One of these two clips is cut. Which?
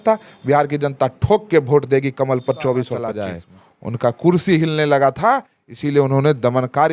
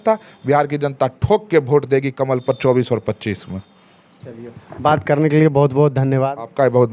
first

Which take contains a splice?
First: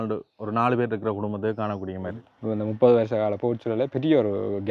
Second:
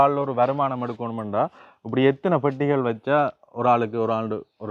first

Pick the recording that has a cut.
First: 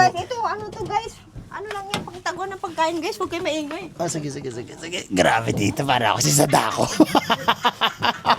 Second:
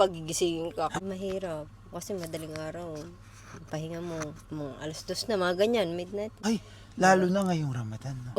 second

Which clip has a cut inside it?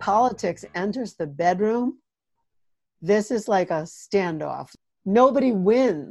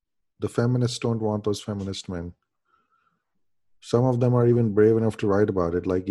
first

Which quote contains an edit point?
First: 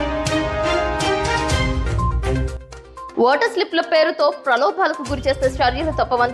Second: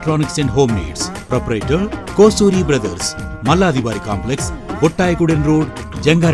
first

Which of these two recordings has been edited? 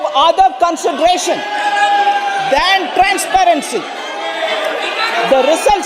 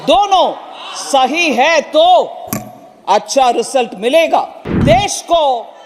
second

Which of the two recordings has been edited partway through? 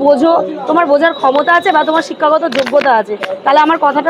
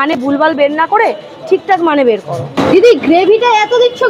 second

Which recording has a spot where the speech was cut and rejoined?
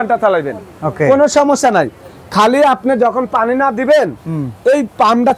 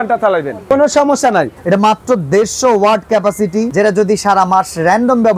second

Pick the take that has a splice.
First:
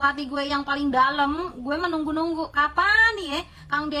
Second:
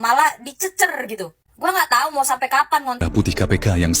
second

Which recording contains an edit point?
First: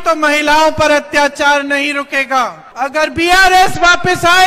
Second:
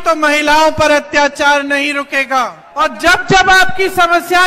second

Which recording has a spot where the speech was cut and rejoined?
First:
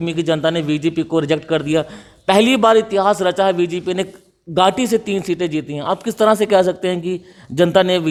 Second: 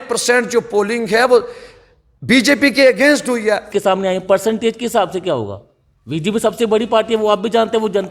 second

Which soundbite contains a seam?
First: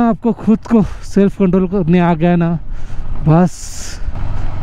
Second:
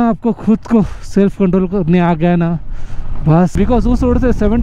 second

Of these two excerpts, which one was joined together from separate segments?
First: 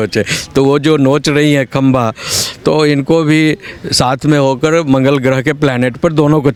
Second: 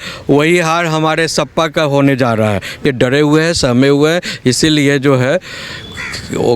second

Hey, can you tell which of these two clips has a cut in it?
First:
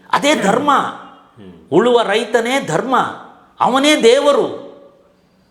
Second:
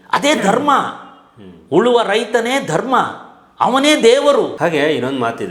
second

